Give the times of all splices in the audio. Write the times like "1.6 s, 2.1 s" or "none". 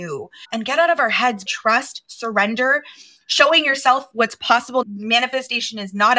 1.4 s, 4.8 s